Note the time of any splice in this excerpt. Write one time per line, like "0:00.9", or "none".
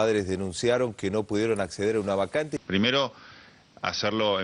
0:02.6